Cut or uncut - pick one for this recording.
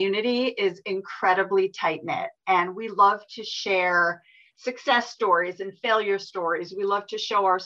uncut